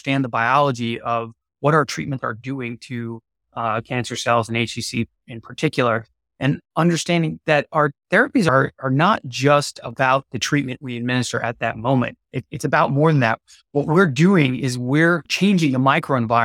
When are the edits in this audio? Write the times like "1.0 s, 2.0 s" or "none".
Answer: 15.3 s

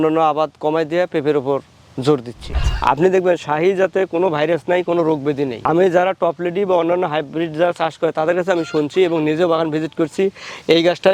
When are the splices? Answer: 2.4 s

